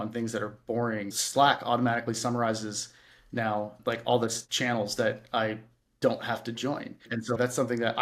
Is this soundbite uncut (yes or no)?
no